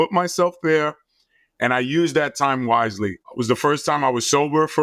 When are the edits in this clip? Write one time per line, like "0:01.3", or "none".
0:03.3